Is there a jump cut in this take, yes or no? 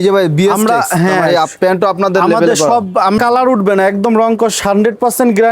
yes